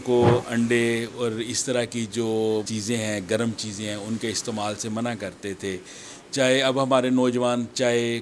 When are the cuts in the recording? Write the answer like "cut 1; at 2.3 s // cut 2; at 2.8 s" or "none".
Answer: cut 1; at 2.7 s